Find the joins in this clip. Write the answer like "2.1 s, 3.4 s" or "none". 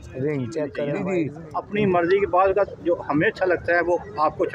0.9 s